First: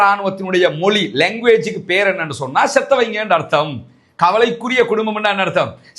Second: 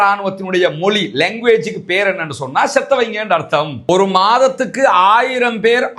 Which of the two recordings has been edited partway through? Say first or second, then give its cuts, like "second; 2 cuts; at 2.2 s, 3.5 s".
second; 1 cut; at 3.8 s